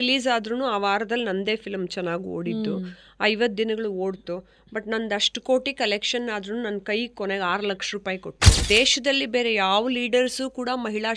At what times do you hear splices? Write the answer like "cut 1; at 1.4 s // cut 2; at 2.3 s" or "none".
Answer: cut 1; at 8.6 s